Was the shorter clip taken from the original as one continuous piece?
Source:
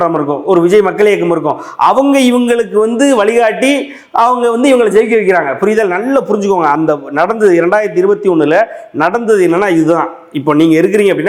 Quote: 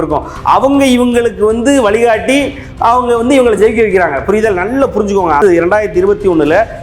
no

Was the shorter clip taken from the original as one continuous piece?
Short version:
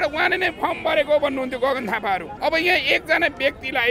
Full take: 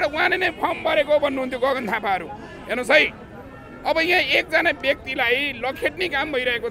no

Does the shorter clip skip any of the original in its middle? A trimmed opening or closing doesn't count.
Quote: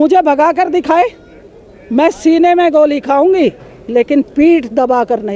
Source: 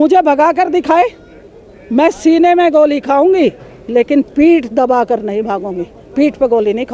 no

